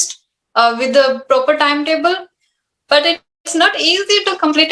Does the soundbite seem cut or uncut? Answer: uncut